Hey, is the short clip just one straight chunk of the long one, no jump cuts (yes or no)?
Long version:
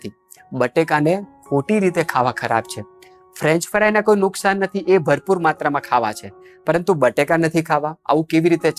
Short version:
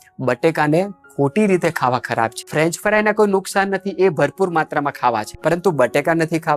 no